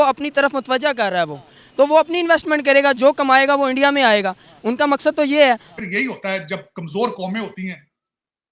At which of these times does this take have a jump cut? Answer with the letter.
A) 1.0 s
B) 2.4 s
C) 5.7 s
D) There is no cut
C